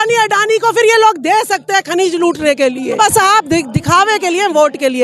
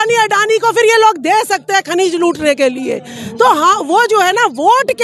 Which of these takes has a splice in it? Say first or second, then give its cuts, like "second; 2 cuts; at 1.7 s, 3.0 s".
first; 1 cut; at 3.0 s